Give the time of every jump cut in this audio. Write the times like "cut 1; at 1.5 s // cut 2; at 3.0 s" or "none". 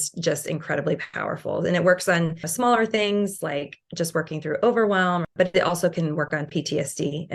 cut 1; at 2.5 s // cut 2; at 5.3 s